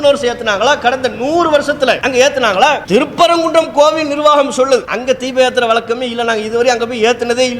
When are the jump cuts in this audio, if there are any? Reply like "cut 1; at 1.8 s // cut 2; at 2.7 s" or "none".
cut 1; at 2.0 s // cut 2; at 2.8 s // cut 3; at 4.9 s